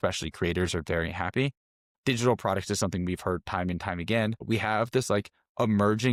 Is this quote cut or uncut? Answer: uncut